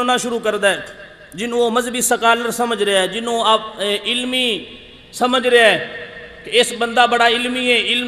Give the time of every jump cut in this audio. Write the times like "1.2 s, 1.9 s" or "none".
none